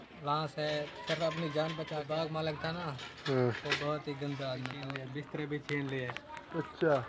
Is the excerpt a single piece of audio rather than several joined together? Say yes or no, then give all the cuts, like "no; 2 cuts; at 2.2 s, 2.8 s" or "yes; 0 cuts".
no; 2 cuts; at 1.9 s, 4.8 s